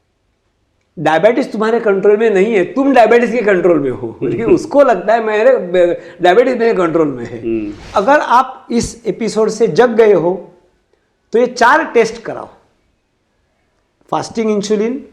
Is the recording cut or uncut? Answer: cut